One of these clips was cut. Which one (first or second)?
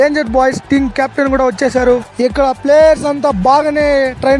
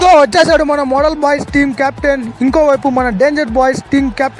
first